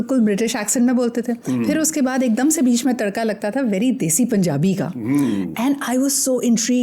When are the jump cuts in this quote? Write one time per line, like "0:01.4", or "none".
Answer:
none